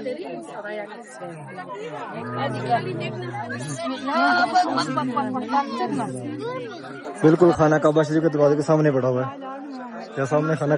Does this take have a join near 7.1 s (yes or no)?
yes